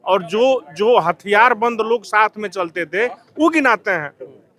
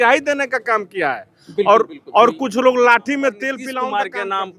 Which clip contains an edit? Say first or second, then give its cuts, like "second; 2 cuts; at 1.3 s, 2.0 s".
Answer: second; 1 cut; at 3.6 s